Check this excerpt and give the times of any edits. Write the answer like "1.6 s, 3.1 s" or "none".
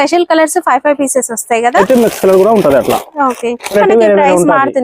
1.8 s, 3.7 s